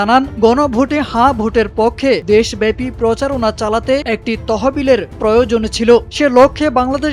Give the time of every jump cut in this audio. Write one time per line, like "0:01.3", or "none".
none